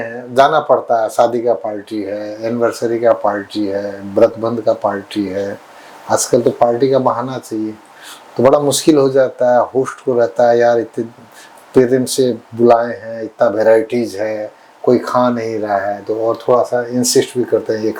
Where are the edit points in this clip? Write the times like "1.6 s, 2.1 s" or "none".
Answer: none